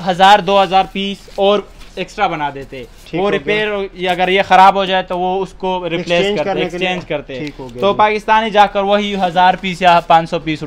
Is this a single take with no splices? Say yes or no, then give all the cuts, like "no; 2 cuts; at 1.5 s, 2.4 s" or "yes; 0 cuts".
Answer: yes; 0 cuts